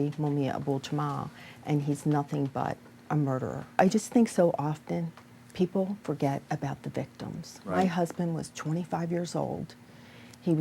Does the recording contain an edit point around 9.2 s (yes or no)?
no